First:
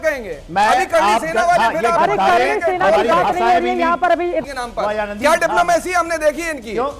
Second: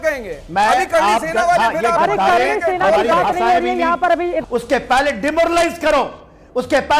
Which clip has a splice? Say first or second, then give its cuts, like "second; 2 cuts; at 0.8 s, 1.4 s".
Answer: first; 1 cut; at 4.4 s